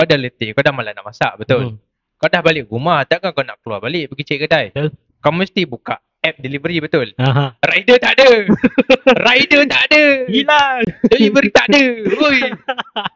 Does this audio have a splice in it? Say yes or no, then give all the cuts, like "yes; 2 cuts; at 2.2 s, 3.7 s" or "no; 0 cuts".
no; 0 cuts